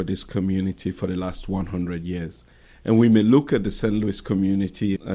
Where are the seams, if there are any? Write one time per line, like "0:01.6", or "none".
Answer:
none

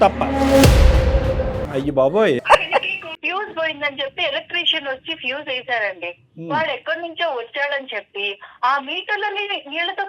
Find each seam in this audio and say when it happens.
0:01.6
0:03.1

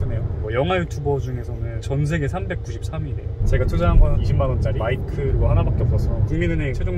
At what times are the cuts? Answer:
0:03.4
0:06.3

